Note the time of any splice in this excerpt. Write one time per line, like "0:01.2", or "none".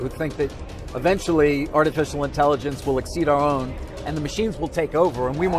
none